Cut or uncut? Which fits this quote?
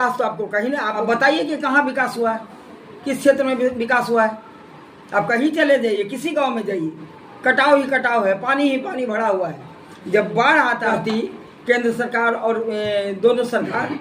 cut